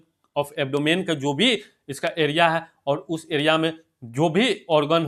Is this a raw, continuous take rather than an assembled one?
yes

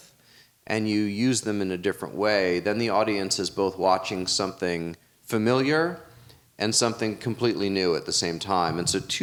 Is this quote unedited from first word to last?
yes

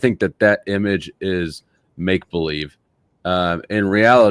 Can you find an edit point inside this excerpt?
no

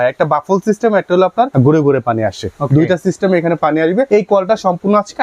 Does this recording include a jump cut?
yes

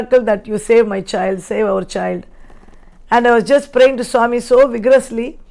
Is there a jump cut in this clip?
no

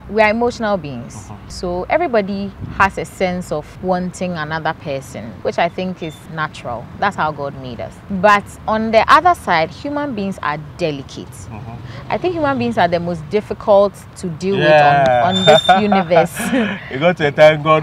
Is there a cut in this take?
no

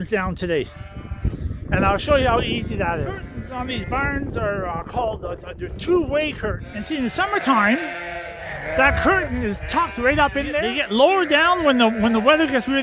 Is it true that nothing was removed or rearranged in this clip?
no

